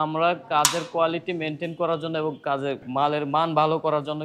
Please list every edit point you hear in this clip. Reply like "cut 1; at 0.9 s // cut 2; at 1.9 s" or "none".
cut 1; at 2.8 s